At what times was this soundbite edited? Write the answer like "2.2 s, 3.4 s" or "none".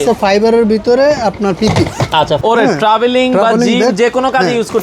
2.4 s